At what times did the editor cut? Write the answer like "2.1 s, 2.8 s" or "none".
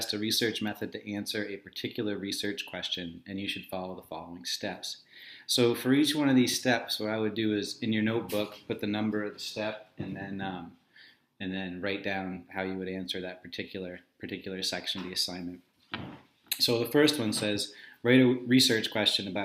1.1 s